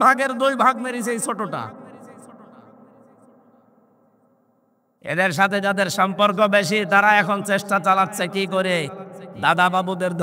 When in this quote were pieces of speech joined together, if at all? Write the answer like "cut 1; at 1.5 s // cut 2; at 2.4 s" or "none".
none

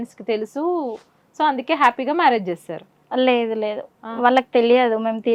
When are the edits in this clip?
none

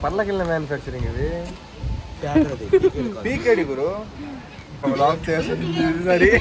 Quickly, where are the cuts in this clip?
cut 1; at 4.8 s

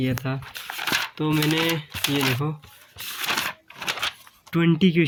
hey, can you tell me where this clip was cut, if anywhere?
none

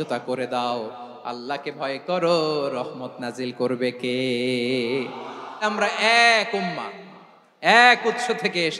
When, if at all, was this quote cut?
cut 1; at 5.7 s

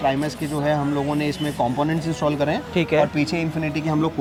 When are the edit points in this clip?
none

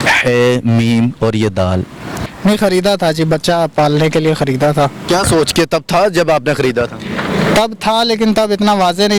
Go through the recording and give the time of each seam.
cut 1; at 2.1 s

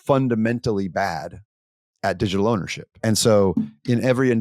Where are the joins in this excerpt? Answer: cut 1; at 3.0 s

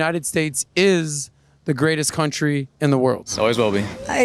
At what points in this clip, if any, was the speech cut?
none

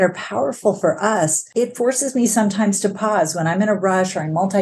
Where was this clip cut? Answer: cut 1; at 1.5 s

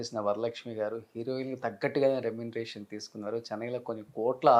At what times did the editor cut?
none

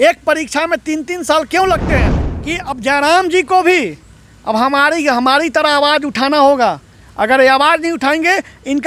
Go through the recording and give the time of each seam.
cut 1; at 2.2 s

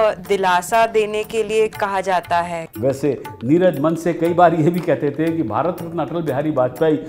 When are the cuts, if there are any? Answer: cut 1; at 2.6 s

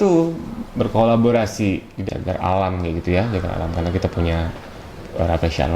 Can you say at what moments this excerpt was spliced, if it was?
cut 1; at 1.9 s

